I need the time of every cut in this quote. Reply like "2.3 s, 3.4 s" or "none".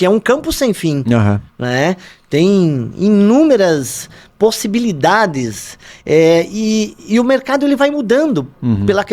none